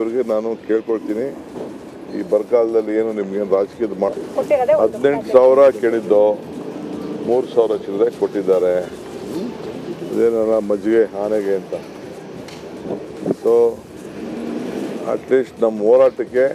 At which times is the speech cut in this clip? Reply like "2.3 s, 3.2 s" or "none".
4.1 s